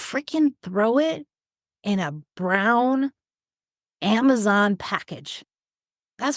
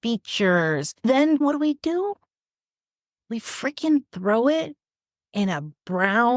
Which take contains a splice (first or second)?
second